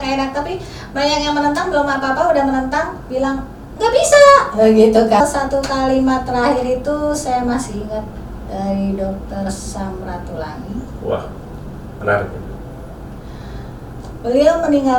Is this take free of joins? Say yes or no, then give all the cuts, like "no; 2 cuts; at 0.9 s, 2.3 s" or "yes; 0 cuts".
no; 1 cut; at 5.2 s